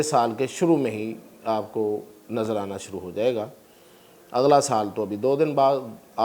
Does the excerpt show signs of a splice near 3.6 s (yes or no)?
no